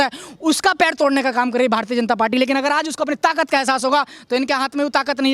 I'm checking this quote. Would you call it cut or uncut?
uncut